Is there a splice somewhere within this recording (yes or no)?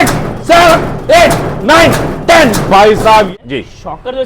yes